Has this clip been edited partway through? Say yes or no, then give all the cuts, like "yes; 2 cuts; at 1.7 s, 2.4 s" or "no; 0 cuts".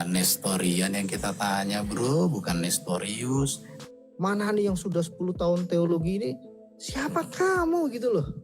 yes; 1 cut; at 3.7 s